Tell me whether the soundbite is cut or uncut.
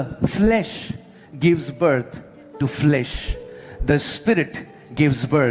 uncut